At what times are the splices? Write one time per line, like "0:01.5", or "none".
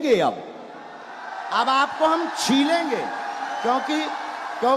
none